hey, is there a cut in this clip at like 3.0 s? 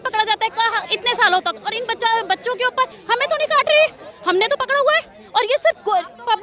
yes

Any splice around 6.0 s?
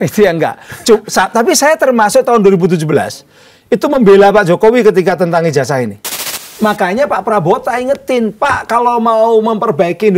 yes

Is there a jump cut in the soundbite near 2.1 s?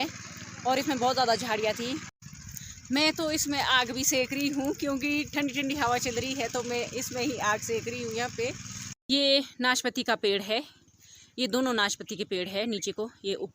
yes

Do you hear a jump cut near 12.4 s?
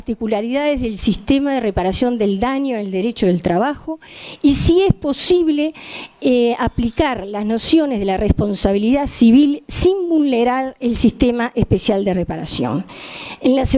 yes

